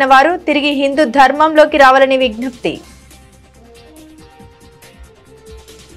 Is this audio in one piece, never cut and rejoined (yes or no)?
yes